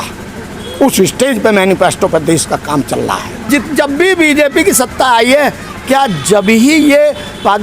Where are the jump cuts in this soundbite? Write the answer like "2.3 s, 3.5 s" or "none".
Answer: 3.5 s